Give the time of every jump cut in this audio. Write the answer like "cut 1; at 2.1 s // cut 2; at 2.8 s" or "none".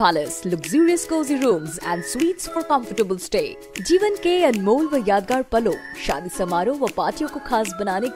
none